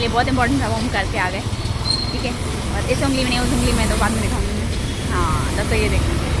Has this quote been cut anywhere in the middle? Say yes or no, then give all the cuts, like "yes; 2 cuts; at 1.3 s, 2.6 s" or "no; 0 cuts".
no; 0 cuts